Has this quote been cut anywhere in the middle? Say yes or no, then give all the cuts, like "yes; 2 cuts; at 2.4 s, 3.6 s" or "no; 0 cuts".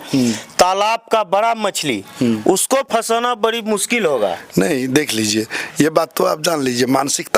no; 0 cuts